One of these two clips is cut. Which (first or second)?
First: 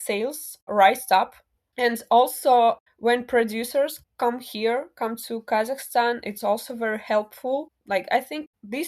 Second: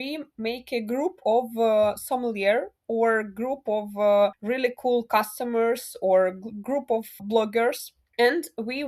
first